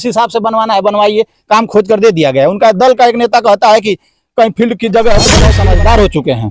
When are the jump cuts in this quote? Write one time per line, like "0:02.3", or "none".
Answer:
0:05.6